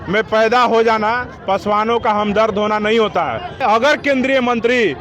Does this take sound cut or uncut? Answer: cut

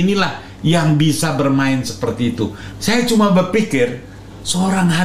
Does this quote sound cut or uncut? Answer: cut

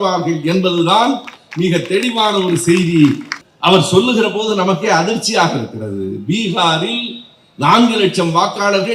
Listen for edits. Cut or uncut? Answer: cut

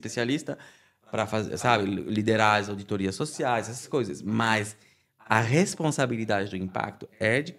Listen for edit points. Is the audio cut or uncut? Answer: uncut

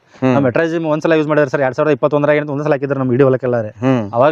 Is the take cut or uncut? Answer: uncut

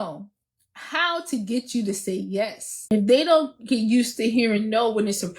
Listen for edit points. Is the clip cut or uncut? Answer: cut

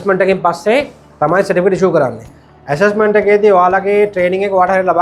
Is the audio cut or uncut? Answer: cut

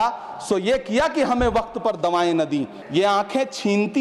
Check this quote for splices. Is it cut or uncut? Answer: cut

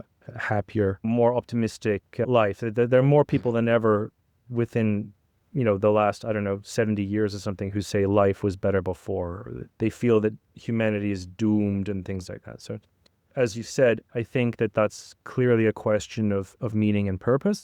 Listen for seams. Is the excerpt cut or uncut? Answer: cut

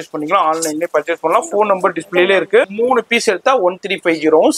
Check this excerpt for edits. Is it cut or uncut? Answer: cut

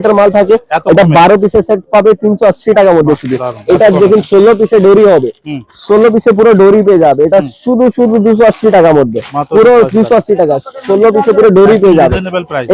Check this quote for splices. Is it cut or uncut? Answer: uncut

